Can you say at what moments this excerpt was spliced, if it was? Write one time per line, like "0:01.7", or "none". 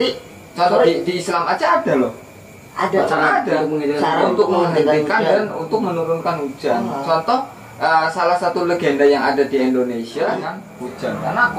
0:10.6